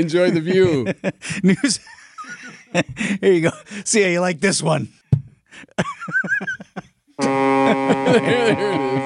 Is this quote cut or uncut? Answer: cut